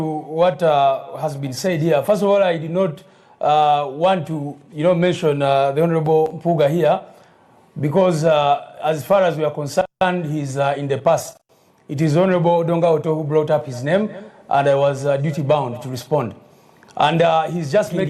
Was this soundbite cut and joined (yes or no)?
yes